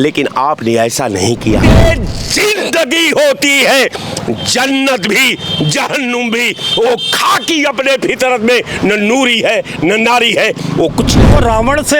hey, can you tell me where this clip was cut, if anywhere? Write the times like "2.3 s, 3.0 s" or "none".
1.8 s, 11.3 s